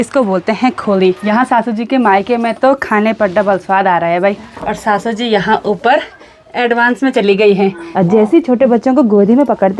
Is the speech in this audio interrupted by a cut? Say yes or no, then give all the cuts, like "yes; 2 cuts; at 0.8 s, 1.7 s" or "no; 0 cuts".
yes; 3 cuts; at 1.2 s, 4.5 s, 7.8 s